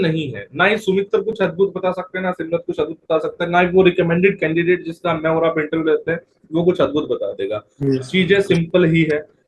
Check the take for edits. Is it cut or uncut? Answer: uncut